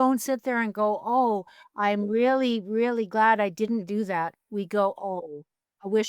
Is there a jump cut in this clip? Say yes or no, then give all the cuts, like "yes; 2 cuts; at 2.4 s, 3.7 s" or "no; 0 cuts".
yes; 1 cut; at 5.1 s